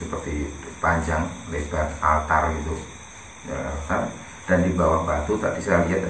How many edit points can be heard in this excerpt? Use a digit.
0